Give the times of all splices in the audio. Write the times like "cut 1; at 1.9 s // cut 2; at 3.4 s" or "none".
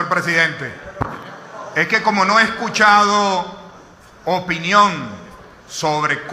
cut 1; at 4.1 s